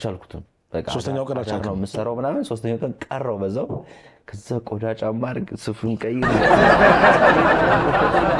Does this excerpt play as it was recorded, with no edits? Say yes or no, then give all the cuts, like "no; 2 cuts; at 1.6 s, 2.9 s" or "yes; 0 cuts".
yes; 0 cuts